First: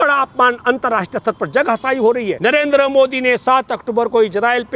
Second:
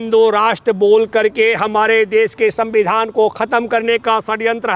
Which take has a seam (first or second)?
first